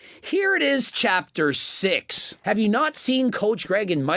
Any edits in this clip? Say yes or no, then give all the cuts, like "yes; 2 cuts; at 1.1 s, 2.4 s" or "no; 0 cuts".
yes; 1 cut; at 2.4 s